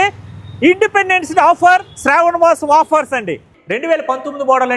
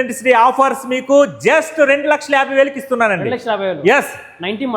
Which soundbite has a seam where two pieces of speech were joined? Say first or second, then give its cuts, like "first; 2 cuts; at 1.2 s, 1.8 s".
first; 1 cut; at 3.5 s